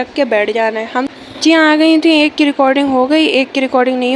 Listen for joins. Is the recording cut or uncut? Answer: cut